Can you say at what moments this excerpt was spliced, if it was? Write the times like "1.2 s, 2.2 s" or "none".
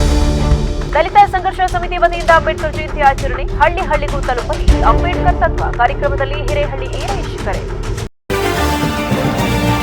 8.1 s